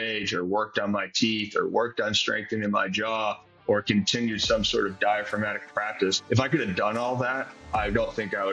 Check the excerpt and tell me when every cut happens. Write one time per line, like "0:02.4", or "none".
0:06.2
0:07.7